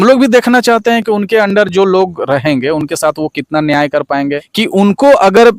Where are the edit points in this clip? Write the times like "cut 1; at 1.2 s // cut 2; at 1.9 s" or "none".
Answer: cut 1; at 4.4 s